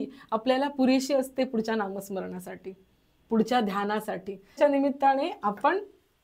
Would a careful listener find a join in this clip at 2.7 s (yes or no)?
no